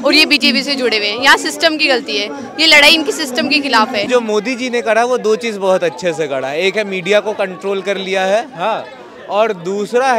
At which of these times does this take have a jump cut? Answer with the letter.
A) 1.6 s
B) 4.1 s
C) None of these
B